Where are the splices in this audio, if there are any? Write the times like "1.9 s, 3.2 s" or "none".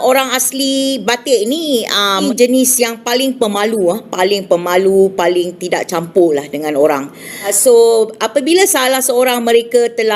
2.2 s, 7.5 s